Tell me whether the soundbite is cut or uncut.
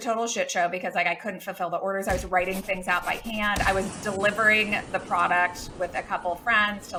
uncut